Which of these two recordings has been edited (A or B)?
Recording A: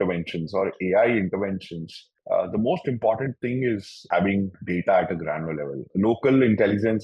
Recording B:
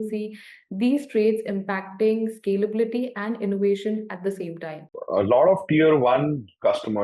B